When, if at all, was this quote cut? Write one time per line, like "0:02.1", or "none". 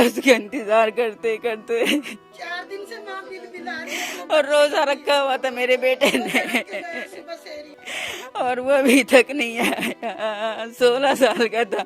0:02.2
0:07.7